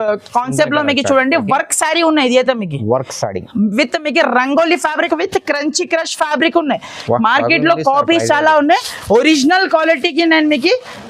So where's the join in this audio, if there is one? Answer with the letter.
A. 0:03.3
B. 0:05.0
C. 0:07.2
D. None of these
B